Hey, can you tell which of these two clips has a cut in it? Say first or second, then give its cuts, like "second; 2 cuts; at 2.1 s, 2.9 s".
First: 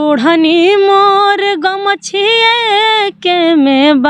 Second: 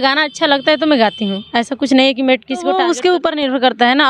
second; 1 cut; at 2.8 s